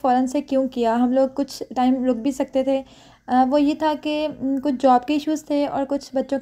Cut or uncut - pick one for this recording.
uncut